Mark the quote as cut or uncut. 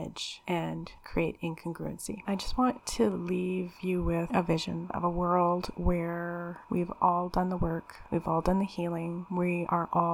cut